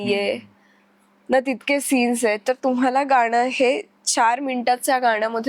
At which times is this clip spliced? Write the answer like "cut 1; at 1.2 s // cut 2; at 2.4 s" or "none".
none

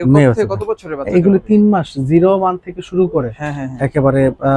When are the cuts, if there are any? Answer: none

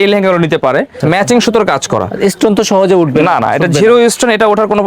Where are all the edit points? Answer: cut 1; at 0.9 s

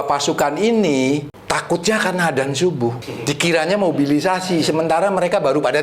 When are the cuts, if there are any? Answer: cut 1; at 1.3 s // cut 2; at 3.1 s

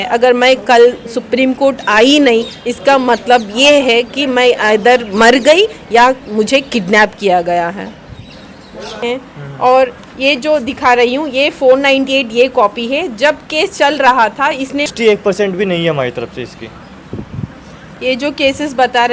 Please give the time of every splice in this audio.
cut 1; at 9.0 s // cut 2; at 14.9 s

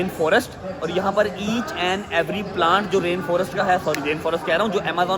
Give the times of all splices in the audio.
none

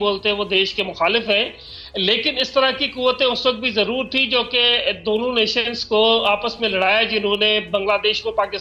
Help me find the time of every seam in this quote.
none

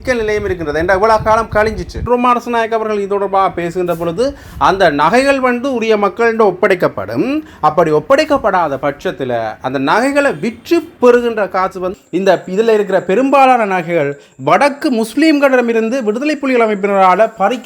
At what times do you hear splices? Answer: cut 1; at 2.0 s // cut 2; at 11.9 s

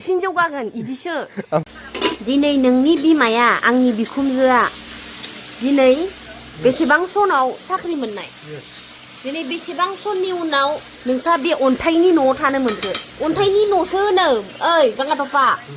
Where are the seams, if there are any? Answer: cut 1; at 1.6 s

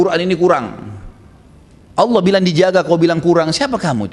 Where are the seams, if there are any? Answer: none

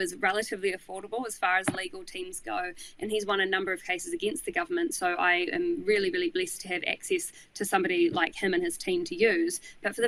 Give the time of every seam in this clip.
none

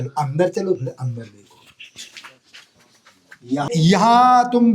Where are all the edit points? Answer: cut 1; at 3.7 s

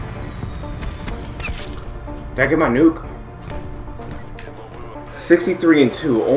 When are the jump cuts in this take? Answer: none

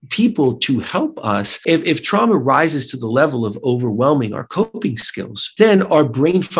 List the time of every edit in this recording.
cut 1; at 1.5 s // cut 2; at 5.4 s

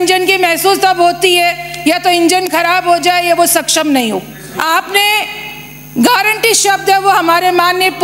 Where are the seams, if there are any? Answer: cut 1; at 4.4 s

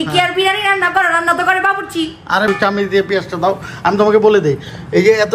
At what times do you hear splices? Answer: cut 1; at 2.4 s

